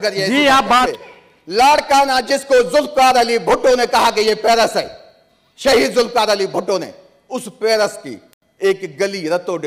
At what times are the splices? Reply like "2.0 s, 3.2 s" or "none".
0.9 s